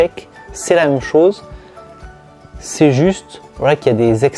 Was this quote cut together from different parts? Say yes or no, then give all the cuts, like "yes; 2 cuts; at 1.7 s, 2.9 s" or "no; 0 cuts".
no; 0 cuts